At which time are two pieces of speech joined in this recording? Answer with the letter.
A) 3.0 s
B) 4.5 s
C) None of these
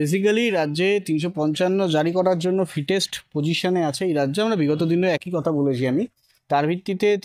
C